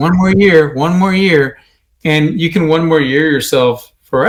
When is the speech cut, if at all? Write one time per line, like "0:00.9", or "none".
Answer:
none